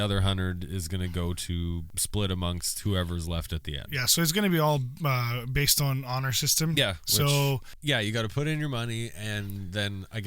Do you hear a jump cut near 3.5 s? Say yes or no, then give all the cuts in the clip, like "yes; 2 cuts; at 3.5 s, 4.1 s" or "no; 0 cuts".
no; 2 cuts; at 1.9 s, 7.7 s